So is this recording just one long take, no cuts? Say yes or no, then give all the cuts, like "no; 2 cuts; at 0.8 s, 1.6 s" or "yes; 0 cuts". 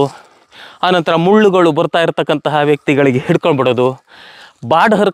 yes; 0 cuts